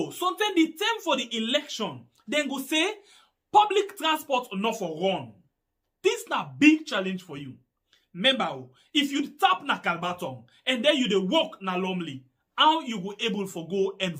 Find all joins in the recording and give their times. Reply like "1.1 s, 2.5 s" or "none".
none